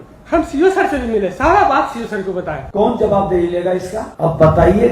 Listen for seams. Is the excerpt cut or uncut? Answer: cut